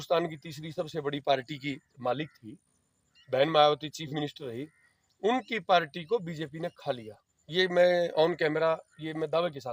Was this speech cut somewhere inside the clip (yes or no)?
no